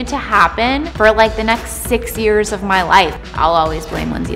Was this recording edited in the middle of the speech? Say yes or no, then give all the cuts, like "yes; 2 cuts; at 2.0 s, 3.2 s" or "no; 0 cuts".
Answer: yes; 2 cuts; at 0.9 s, 3.1 s